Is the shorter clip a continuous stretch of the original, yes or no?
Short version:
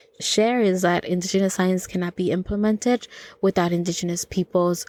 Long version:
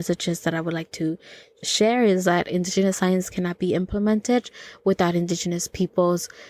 yes